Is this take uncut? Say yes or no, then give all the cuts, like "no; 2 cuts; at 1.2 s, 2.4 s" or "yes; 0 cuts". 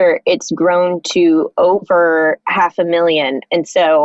no; 1 cut; at 2.4 s